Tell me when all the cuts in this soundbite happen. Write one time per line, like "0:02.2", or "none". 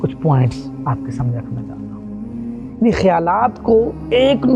0:01.4
0:02.8